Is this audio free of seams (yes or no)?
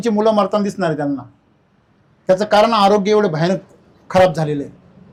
yes